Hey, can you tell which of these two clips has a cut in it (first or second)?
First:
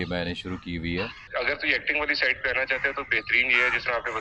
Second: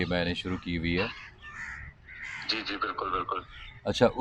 first